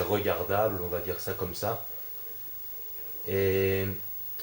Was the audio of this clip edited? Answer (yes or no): yes